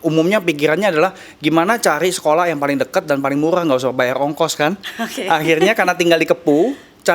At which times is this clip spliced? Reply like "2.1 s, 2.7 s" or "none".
none